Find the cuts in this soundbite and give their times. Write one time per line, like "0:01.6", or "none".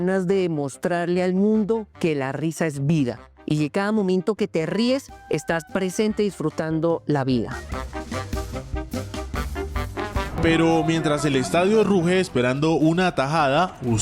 0:10.3